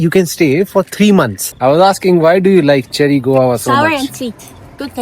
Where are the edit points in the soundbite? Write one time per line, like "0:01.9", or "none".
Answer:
0:01.4